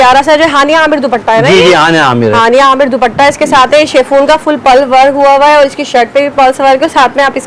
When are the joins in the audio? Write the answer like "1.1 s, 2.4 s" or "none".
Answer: none